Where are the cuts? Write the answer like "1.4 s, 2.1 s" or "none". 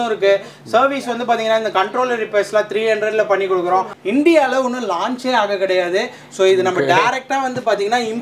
4.0 s